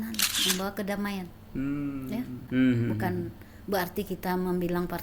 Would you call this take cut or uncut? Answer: cut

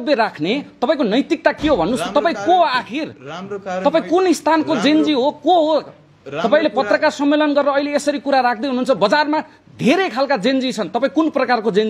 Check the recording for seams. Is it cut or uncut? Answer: uncut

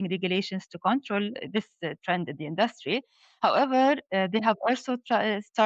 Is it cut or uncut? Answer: cut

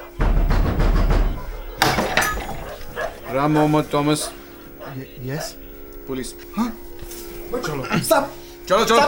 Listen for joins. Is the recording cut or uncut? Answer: cut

